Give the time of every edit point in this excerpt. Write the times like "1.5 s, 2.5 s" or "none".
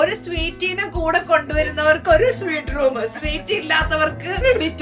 none